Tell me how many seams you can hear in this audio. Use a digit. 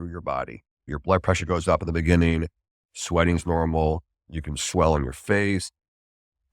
2